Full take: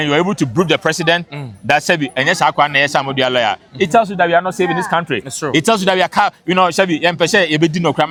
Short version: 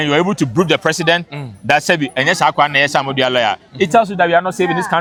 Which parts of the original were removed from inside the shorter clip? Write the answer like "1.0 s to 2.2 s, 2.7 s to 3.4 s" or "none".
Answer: none